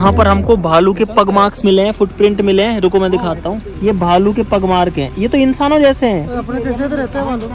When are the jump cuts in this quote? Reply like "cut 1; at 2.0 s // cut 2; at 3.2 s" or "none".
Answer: none